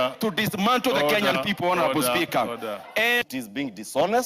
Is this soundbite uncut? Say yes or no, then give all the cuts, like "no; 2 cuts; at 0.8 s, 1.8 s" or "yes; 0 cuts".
no; 1 cut; at 3.2 s